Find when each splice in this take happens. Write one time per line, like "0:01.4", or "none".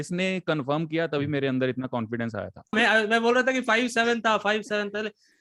0:02.7